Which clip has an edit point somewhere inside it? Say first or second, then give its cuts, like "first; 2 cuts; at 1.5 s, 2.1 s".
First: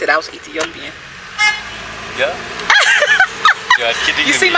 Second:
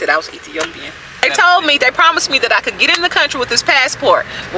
second; 1 cut; at 1.2 s